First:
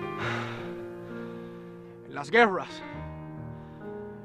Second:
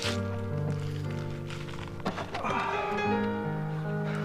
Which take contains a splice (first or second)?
second